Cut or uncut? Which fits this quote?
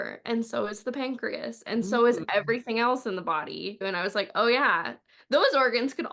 cut